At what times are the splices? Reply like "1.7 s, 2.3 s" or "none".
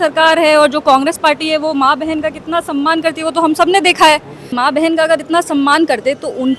4.6 s